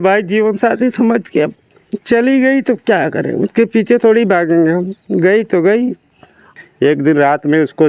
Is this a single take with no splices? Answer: no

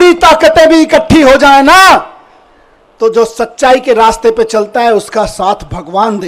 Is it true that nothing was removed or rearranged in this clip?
yes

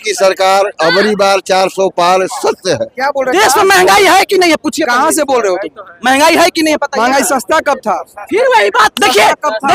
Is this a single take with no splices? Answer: no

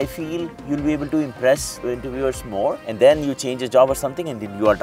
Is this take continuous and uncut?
no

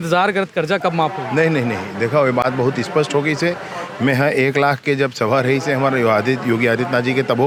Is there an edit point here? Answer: no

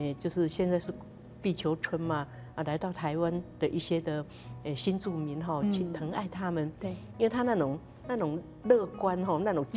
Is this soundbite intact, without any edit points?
yes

